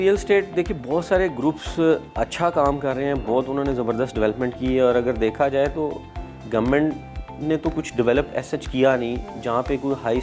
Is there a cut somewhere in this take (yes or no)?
no